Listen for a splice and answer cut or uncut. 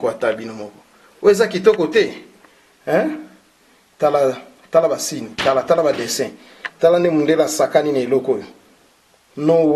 uncut